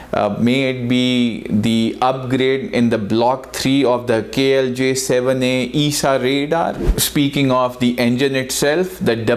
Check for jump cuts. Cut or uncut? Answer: uncut